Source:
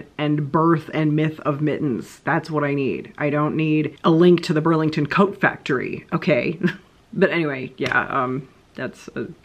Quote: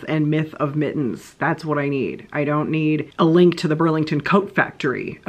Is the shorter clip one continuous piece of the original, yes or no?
yes